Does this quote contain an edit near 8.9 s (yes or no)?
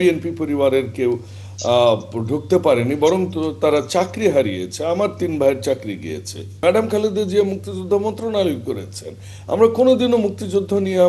no